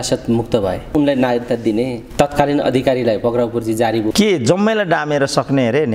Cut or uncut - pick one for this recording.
cut